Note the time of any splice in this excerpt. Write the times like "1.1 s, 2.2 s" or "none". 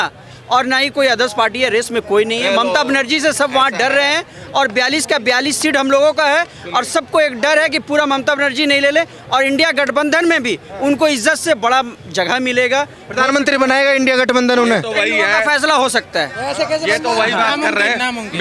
none